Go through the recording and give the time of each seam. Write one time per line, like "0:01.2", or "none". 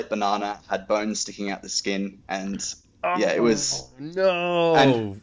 none